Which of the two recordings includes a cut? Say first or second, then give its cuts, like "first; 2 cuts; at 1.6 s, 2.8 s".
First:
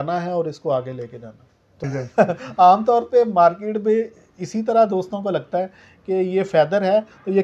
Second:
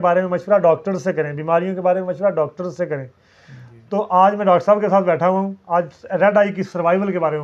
first; 1 cut; at 1.8 s